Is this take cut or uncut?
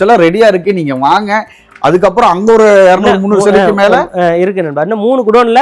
uncut